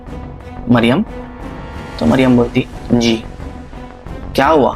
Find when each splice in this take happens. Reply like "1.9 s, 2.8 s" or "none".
none